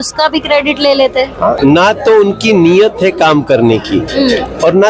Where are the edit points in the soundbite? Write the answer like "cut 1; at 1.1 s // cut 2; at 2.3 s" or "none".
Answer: cut 1; at 1.6 s